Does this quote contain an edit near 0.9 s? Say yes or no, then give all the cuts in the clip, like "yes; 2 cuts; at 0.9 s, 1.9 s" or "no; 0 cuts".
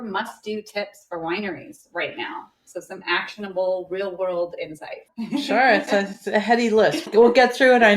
no; 2 cuts; at 5.1 s, 7.1 s